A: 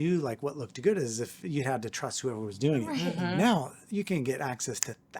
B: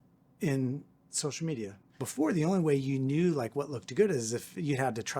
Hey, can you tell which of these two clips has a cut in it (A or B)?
B